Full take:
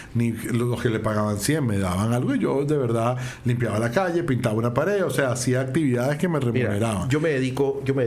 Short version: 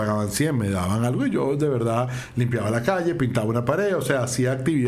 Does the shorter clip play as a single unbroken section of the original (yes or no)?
yes